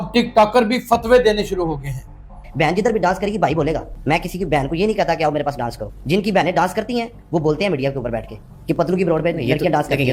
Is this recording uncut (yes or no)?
no